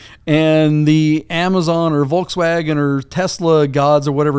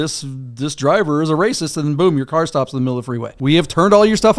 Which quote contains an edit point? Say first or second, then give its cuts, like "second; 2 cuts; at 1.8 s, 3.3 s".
second; 1 cut; at 3.3 s